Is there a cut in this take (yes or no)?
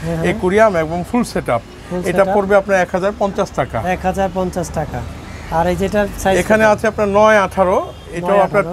no